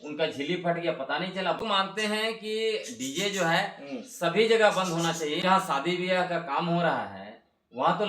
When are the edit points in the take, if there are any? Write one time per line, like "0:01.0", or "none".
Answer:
0:01.6
0:05.4